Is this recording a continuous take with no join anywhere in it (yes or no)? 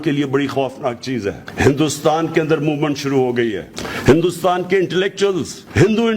no